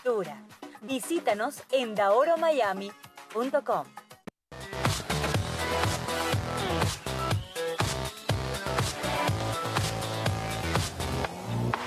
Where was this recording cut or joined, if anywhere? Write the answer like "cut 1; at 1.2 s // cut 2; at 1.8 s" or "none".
none